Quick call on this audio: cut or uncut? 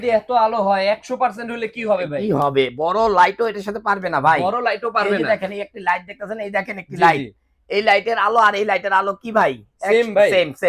uncut